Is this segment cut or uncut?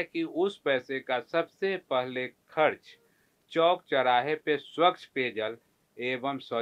uncut